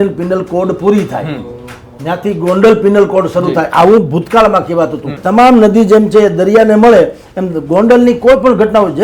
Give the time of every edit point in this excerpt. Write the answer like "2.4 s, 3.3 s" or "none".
5.2 s